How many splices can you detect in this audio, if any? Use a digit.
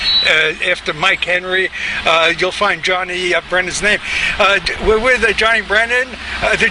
1